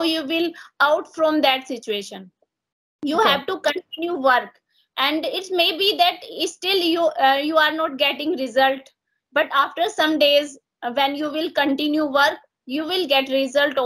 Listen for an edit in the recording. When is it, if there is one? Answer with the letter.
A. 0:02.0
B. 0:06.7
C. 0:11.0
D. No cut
D